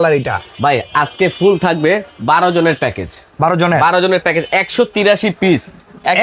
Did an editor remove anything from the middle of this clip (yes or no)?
no